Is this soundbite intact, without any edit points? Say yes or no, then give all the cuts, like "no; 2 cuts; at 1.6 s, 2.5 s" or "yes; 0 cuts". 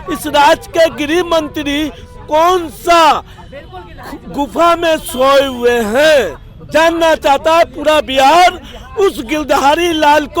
yes; 0 cuts